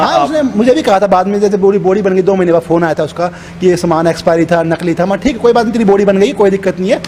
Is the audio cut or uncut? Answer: uncut